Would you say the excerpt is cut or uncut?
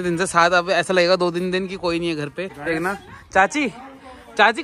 uncut